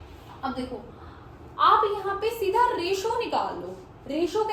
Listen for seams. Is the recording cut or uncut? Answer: uncut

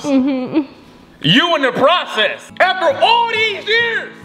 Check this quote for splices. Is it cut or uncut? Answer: cut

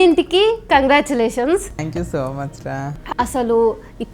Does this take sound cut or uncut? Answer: cut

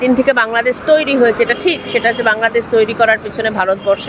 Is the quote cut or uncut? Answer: uncut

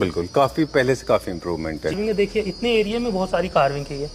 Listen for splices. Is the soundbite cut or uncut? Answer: cut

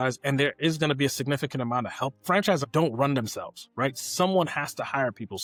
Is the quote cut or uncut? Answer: uncut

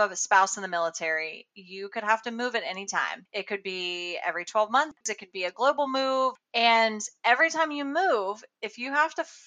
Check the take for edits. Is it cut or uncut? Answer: cut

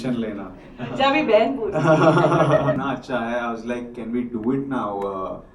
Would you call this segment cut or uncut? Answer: cut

